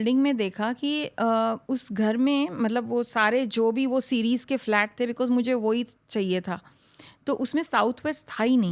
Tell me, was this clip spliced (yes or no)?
no